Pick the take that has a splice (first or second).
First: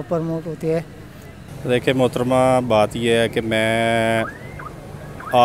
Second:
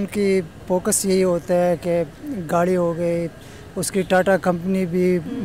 first